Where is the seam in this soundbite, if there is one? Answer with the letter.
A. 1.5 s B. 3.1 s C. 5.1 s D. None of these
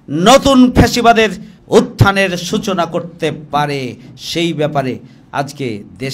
A